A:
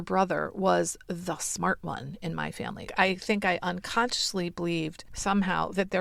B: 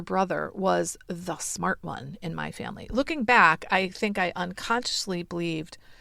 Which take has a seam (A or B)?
A